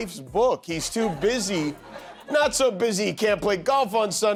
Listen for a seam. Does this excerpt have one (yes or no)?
no